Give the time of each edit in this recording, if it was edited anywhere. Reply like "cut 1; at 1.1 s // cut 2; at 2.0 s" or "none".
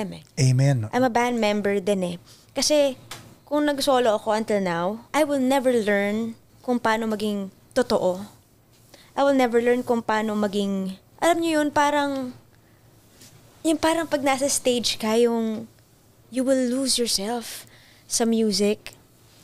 cut 1; at 5.0 s // cut 2; at 6.5 s // cut 3; at 7.6 s // cut 4; at 11.0 s